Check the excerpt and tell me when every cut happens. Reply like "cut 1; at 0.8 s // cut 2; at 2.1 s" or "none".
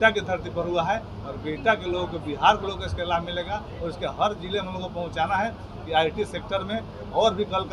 none